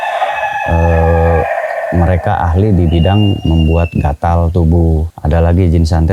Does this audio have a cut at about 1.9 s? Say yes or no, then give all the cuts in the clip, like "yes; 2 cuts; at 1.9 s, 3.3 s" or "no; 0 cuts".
no; 1 cut; at 5.1 s